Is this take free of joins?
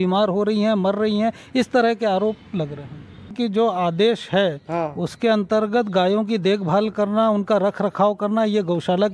no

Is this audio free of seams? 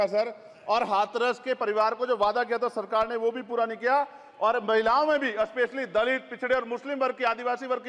yes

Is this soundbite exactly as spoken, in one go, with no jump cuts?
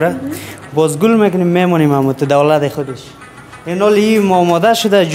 yes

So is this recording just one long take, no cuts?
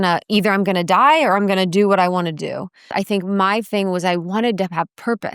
no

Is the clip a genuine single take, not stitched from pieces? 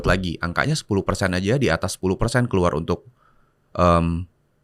yes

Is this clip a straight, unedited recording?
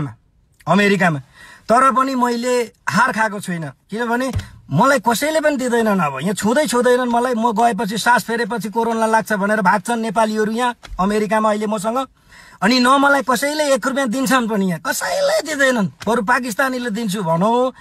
yes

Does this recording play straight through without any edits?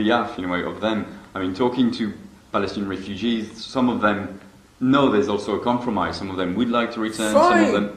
no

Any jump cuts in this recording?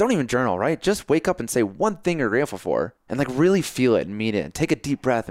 yes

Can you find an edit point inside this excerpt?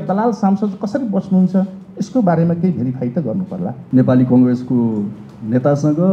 yes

